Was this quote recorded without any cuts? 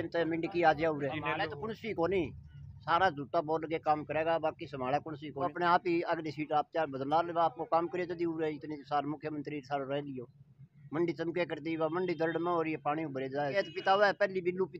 no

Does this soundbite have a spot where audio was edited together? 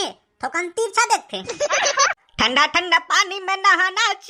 yes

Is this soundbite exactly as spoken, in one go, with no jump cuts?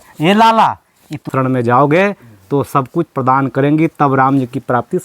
no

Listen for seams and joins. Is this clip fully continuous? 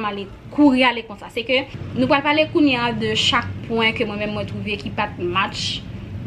no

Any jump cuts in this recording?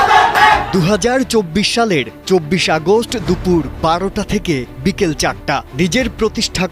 no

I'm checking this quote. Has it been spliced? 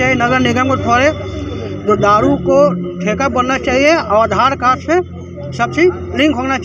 no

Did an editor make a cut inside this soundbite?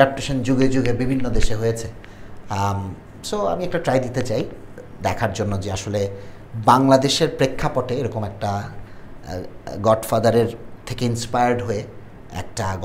no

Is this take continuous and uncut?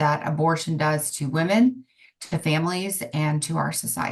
yes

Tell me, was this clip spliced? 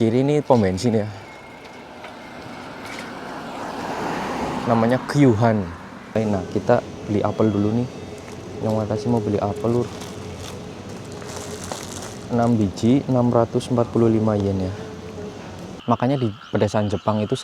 yes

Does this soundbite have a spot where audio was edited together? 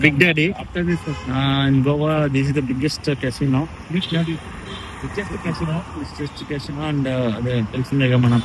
no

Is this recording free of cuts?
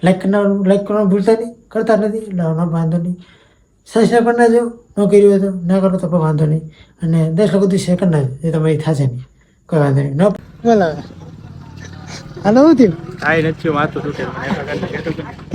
no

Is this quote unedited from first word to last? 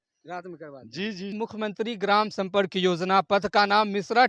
no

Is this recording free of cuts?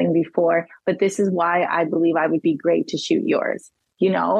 yes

